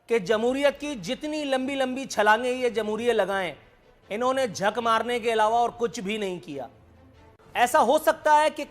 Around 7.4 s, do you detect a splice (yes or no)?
yes